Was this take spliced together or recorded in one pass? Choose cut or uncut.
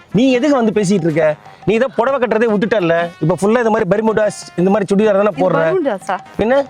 uncut